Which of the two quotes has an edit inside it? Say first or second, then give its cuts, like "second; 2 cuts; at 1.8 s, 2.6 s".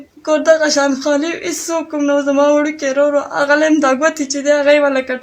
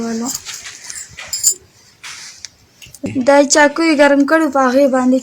second; 1 cut; at 3.0 s